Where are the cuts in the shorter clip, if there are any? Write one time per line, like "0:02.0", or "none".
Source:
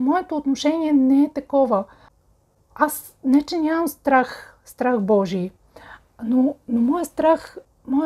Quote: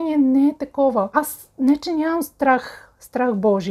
0:01.1